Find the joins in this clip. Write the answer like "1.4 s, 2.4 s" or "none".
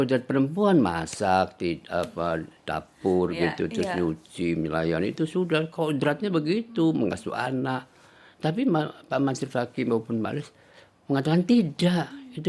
none